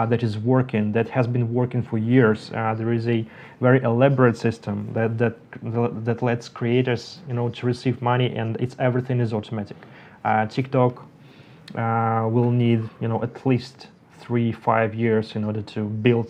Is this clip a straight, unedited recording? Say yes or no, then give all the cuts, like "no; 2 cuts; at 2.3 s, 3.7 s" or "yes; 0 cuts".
yes; 0 cuts